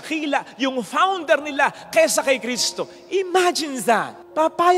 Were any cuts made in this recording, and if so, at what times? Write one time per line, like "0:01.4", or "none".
none